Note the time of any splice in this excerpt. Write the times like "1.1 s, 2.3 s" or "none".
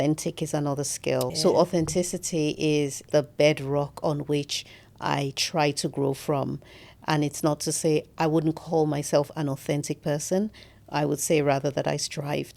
1.3 s, 3.0 s